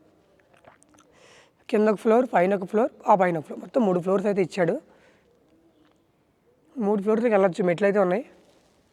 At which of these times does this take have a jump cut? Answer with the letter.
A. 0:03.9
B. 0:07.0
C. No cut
C